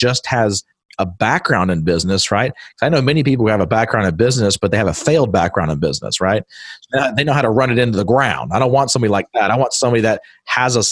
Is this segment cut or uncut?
uncut